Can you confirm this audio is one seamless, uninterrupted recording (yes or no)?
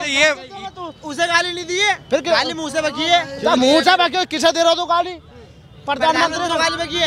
yes